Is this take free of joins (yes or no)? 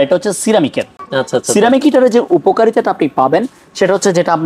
yes